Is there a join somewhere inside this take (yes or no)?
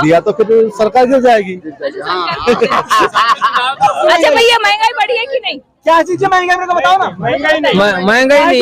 yes